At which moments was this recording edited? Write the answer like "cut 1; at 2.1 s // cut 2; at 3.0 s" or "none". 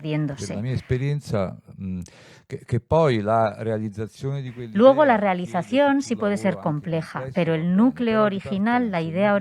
none